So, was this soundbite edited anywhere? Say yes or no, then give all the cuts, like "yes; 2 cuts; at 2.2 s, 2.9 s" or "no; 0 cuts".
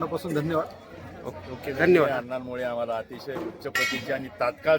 yes; 1 cut; at 2.1 s